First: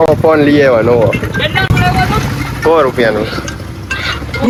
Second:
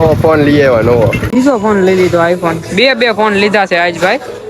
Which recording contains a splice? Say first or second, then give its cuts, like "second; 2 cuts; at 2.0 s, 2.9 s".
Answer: second; 1 cut; at 1.2 s